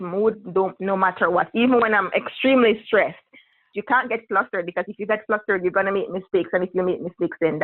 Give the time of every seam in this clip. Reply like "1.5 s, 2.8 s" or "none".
3.6 s